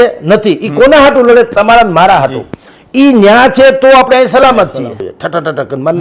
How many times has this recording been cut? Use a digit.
1